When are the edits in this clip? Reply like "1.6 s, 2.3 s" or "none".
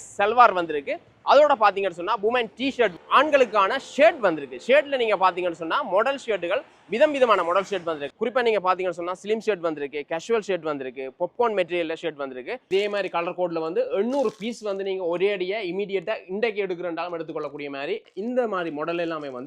3.0 s, 12.6 s, 18.0 s